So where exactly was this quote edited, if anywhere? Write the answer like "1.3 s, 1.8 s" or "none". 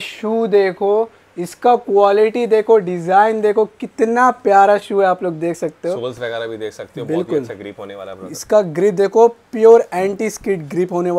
none